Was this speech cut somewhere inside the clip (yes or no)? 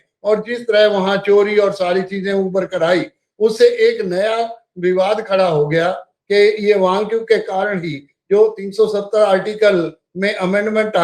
yes